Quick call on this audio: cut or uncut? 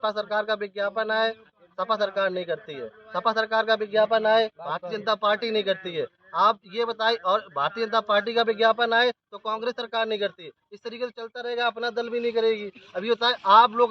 uncut